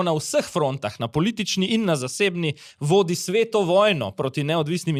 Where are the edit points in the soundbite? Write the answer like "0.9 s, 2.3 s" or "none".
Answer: none